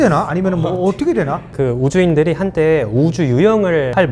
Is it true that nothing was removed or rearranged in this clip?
no; 1 cut; at 1.5 s

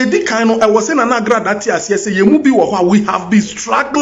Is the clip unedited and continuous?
yes; 0 cuts

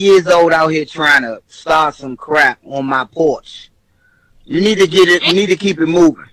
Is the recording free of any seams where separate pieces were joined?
yes; 0 cuts

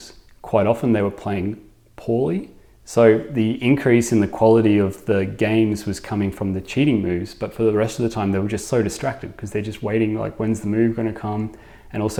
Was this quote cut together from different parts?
no; 0 cuts

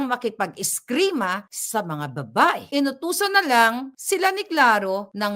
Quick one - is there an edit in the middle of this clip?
yes; 2 cuts; at 1.5 s, 2.6 s

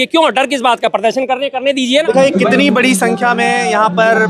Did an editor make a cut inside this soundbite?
yes; 1 cut; at 2.0 s

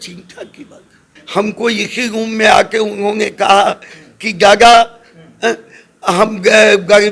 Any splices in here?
yes; 1 cut; at 1.1 s

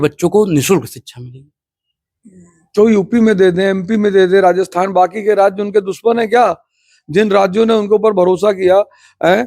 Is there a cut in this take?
no; 0 cuts

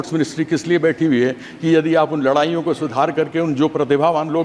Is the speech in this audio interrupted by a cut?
no; 0 cuts

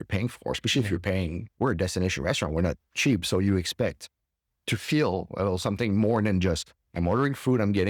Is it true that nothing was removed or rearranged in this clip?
no; 1 cut; at 1.4 s

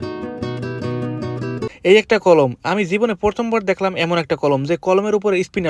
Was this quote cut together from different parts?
yes; 1 cut; at 1.7 s

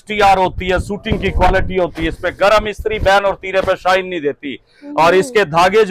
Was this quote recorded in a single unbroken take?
yes; 0 cuts

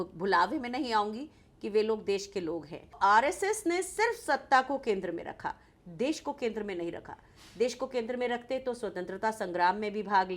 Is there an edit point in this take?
yes; 1 cut; at 2.9 s

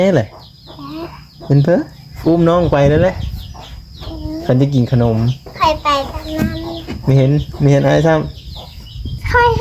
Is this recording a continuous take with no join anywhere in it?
yes; 0 cuts

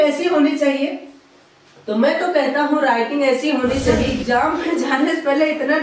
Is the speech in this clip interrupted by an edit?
yes; 1 cut; at 4.2 s

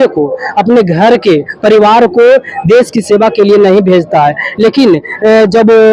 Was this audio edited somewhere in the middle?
no; 0 cuts

